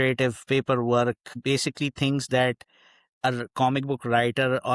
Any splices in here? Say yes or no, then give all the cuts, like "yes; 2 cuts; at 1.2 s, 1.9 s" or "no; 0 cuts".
yes; 1 cut; at 1.3 s